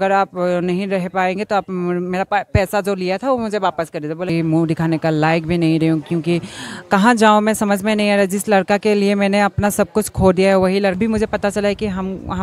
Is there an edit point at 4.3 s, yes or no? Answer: yes